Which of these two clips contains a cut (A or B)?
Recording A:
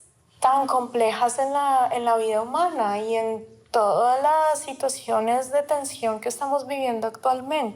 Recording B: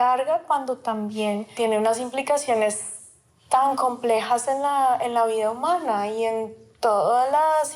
B